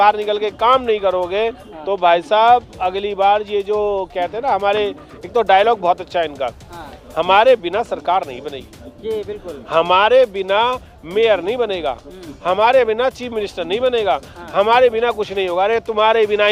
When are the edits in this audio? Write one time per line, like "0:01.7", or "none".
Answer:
none